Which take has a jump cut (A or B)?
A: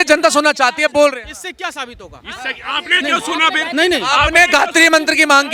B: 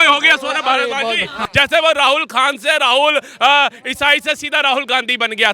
B